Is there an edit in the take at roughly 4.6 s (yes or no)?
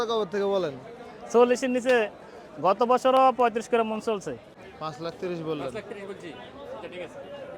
yes